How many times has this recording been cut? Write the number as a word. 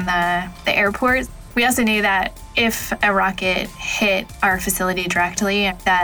two